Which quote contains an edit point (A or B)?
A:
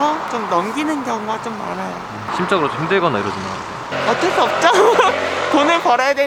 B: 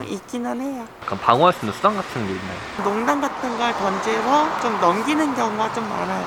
B